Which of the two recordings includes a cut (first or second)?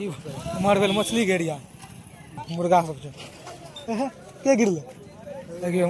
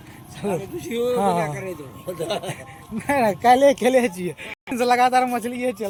first